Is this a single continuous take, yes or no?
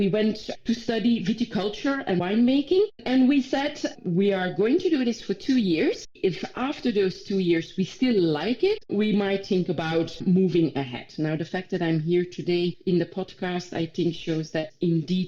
no